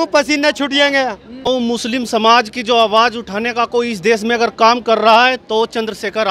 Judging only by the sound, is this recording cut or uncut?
cut